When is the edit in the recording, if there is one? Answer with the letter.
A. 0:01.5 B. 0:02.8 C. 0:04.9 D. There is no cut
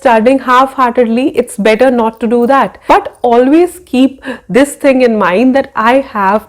B